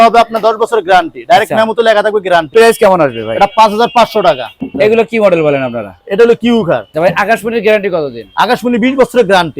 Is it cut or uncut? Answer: cut